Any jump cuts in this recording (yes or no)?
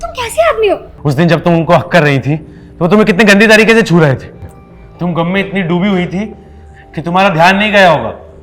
yes